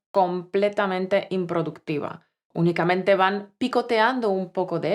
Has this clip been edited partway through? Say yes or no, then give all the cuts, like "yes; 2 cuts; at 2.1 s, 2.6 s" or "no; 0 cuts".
yes; 1 cut; at 2.4 s